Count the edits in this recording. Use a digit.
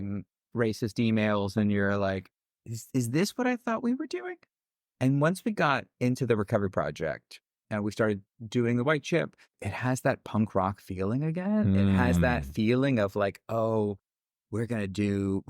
1